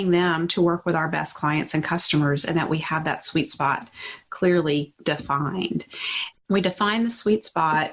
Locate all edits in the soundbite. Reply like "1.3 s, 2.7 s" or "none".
6.3 s